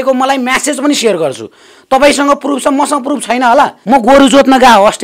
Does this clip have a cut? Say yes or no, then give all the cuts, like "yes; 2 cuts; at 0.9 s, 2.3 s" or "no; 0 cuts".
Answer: yes; 1 cut; at 3.8 s